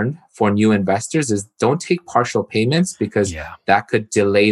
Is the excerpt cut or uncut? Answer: uncut